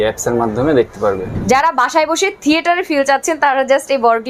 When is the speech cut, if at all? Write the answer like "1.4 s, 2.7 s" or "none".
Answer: 1.3 s